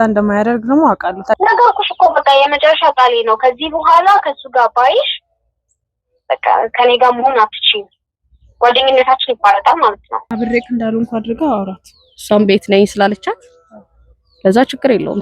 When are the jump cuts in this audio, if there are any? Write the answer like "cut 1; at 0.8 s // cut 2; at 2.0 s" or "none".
cut 1; at 1.4 s // cut 2; at 10.3 s